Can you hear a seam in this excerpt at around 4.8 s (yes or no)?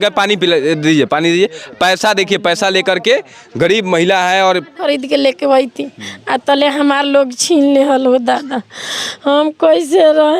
yes